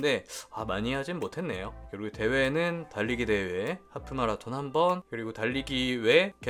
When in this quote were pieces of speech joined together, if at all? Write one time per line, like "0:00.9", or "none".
none

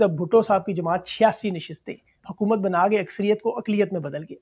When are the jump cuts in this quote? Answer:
none

